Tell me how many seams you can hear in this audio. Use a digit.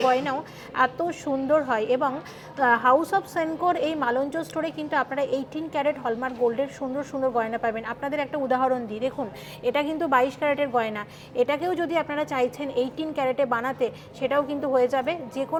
0